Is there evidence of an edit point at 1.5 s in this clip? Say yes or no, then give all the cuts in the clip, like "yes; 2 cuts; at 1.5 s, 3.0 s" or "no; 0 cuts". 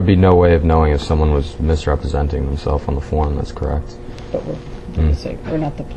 no; 0 cuts